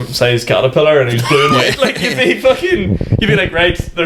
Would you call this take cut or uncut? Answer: uncut